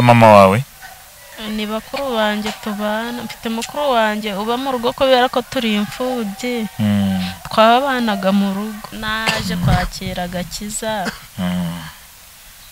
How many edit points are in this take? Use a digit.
1